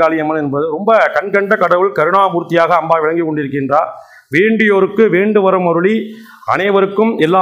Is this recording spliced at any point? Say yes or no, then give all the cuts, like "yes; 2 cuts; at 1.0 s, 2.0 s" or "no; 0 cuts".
no; 0 cuts